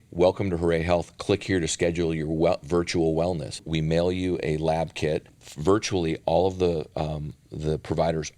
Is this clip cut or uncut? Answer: cut